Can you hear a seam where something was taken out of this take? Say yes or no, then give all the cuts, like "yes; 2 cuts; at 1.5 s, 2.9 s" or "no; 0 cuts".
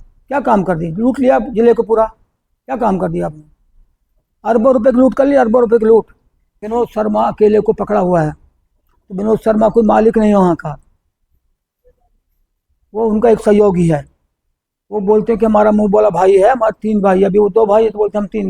yes; 1 cut; at 6.6 s